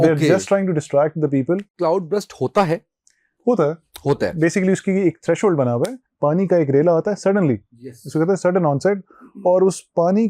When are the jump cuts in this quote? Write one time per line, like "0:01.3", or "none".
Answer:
0:01.7
0:06.0